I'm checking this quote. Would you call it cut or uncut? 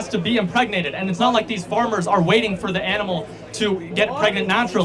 uncut